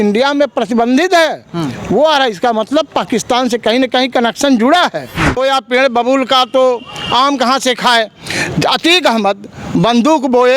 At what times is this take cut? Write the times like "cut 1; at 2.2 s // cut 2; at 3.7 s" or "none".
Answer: cut 1; at 5.4 s